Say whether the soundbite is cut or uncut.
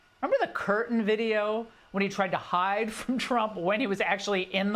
uncut